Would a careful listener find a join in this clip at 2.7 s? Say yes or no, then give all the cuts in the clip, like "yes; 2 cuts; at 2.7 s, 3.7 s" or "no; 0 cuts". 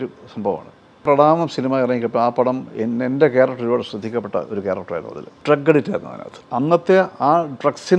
no; 3 cuts; at 1.0 s, 5.4 s, 6.3 s